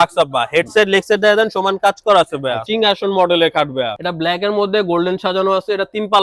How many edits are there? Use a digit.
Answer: 2